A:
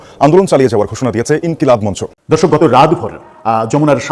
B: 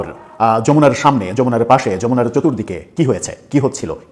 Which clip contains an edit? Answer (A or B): A